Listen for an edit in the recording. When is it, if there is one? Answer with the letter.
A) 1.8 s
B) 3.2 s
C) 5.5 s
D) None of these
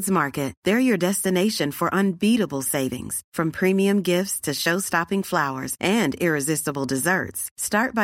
D